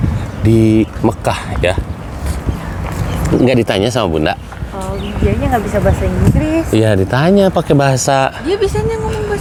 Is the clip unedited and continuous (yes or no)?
yes